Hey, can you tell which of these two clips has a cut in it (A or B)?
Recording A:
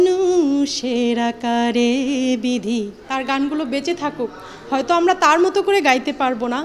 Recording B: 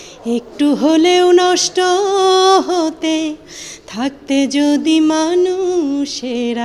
A